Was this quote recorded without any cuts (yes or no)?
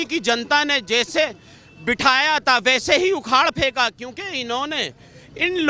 yes